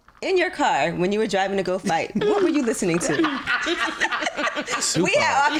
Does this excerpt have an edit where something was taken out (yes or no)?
no